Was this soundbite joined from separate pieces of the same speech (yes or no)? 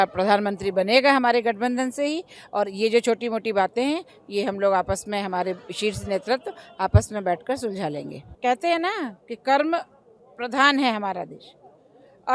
yes